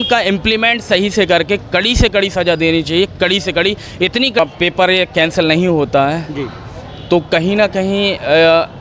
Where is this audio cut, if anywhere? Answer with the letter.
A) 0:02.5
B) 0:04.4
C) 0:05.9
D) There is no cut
B